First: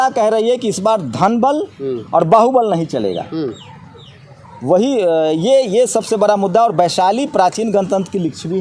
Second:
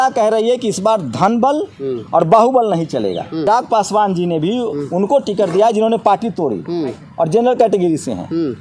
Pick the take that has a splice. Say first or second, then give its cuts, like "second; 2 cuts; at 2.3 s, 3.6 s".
second; 1 cut; at 3.5 s